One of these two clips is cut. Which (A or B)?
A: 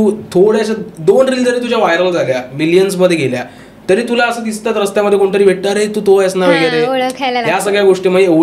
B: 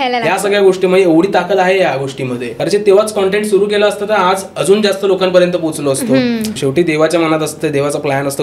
B